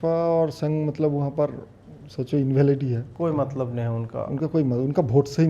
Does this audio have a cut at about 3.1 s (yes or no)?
yes